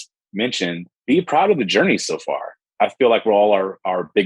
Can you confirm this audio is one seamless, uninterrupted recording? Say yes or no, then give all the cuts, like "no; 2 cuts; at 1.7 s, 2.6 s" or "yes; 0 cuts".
no; 1 cut; at 2.6 s